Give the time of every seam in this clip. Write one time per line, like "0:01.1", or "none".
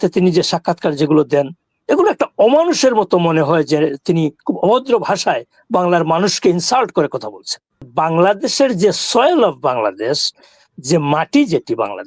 0:07.9